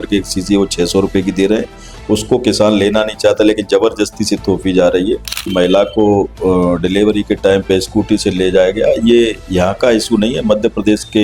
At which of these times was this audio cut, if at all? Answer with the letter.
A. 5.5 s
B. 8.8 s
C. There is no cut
A